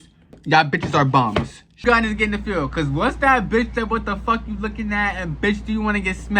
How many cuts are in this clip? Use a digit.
1